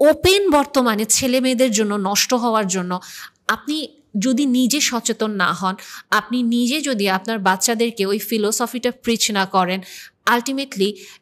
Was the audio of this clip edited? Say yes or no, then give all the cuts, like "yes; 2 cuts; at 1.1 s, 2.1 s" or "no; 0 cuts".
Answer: no; 0 cuts